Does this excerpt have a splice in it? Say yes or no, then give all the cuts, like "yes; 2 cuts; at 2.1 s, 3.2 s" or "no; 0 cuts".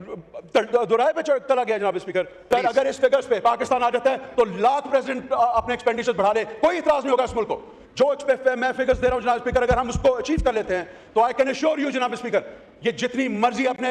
yes; 1 cut; at 2.4 s